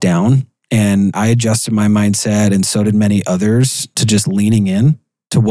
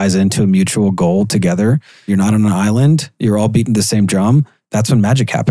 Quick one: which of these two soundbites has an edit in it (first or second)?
second